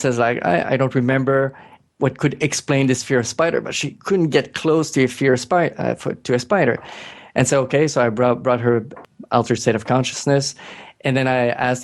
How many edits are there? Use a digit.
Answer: 2